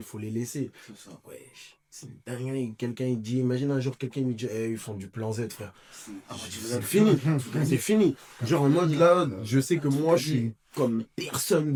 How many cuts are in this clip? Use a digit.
0